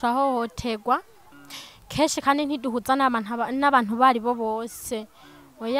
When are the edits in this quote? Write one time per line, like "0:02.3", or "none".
none